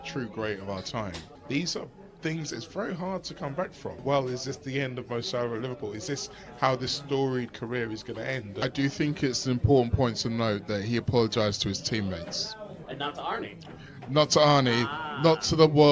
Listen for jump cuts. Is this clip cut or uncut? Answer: cut